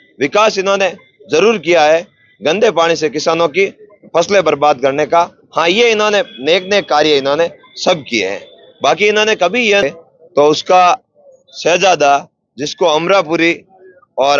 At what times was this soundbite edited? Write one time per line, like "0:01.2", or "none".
0:09.8